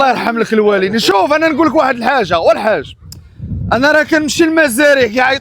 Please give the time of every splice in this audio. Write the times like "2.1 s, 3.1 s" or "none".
none